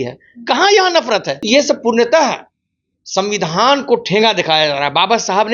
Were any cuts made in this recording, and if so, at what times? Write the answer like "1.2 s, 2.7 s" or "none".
1.3 s